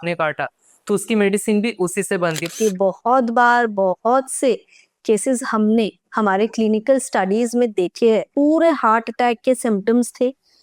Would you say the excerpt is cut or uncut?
cut